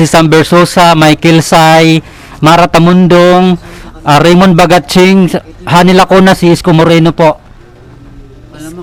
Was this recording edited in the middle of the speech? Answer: no; 0 cuts

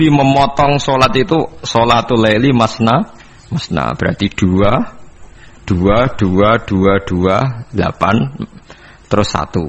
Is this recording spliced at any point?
no; 0 cuts

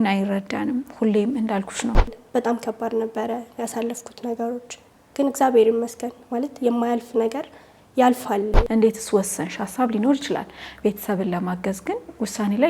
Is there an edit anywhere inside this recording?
yes; 2 cuts; at 2.2 s, 8.6 s

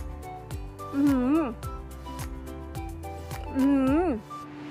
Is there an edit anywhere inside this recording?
no; 0 cuts

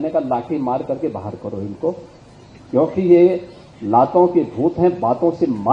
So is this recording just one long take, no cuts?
yes; 0 cuts

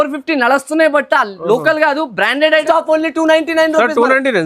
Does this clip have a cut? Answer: yes; 1 cut; at 2.6 s

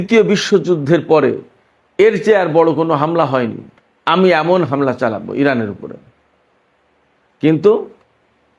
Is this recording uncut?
yes; 0 cuts

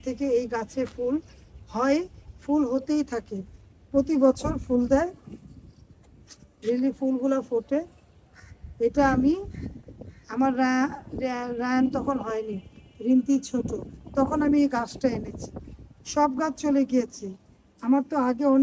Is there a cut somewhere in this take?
no; 0 cuts

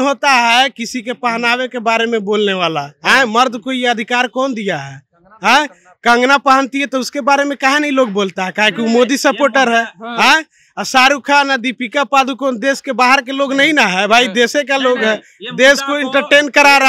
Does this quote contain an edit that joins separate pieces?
no; 0 cuts

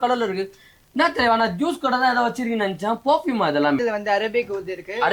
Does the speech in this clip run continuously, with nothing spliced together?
no; 1 cut; at 3.8 s

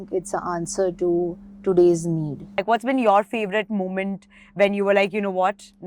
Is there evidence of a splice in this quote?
yes; 1 cut; at 2.6 s

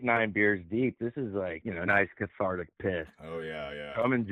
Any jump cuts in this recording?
yes; 1 cut; at 1.6 s

